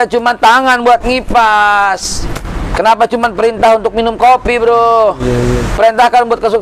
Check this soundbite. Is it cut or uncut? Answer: uncut